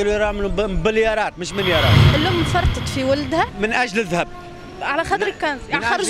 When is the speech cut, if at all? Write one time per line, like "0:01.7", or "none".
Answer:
0:02.1

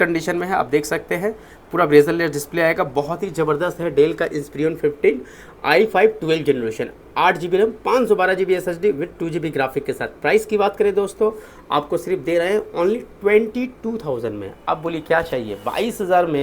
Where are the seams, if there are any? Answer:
none

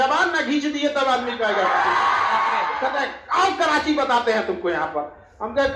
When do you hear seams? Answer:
0:02.9

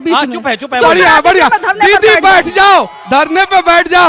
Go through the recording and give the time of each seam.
none

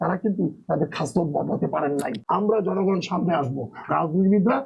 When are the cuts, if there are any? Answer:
0:02.2

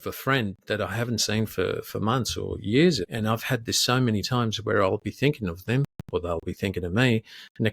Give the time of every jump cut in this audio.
0:03.0

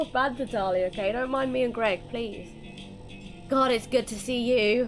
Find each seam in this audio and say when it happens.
none

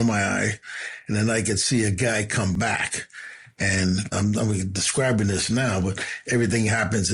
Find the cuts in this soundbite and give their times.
0:04.1

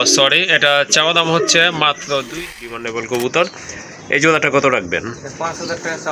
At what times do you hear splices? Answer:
0:02.5

